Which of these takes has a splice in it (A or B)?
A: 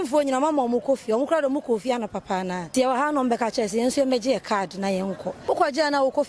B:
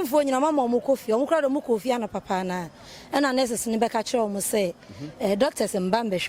A